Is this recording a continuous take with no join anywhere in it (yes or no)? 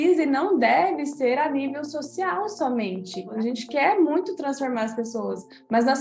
no